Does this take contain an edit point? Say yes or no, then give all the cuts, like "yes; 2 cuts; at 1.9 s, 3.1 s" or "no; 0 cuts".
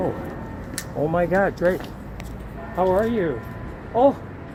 no; 0 cuts